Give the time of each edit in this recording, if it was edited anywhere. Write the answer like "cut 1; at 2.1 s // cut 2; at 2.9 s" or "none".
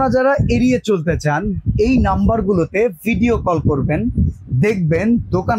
none